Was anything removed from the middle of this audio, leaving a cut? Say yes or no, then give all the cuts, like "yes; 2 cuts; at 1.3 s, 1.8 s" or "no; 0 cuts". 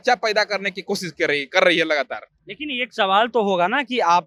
no; 0 cuts